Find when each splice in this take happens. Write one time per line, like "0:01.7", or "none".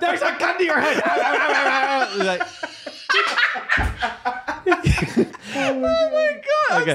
0:05.4